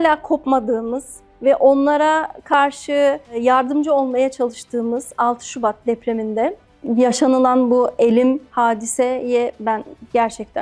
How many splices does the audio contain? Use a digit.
0